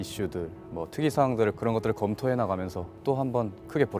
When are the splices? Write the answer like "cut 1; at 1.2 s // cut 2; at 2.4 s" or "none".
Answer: cut 1; at 1.6 s // cut 2; at 3.0 s